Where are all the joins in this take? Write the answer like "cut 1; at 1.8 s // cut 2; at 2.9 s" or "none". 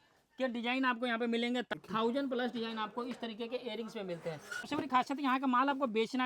cut 1; at 1.7 s // cut 2; at 4.7 s

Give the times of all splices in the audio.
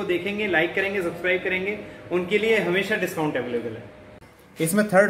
cut 1; at 4.1 s

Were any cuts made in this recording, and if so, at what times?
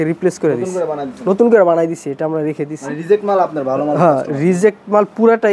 none

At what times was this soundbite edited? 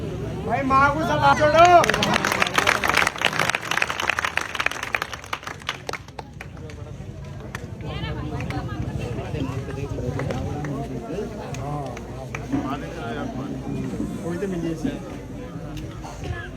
cut 1; at 1.4 s

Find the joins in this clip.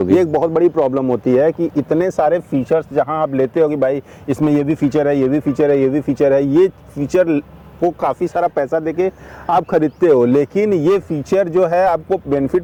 none

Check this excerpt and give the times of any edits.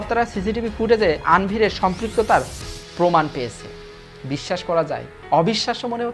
none

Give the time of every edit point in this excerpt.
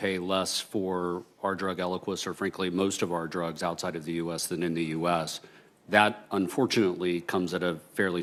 none

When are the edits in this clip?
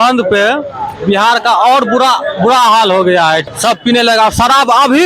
cut 1; at 3.5 s

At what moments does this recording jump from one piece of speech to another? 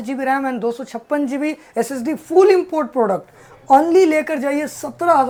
none

